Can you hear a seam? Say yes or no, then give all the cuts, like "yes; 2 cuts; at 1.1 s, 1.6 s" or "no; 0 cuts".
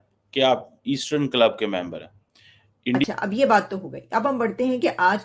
yes; 1 cut; at 3.0 s